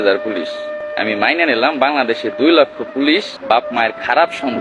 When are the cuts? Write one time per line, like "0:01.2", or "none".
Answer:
0:00.9
0:03.3